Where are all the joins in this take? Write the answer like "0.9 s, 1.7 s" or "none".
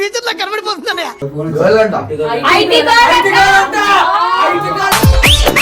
1.2 s